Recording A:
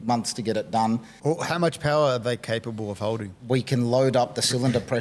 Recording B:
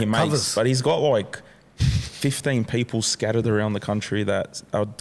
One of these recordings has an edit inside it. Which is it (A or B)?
A